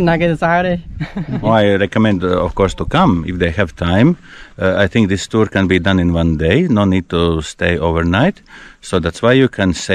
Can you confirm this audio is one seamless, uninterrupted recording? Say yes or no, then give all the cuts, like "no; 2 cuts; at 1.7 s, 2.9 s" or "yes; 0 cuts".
no; 1 cut; at 1.4 s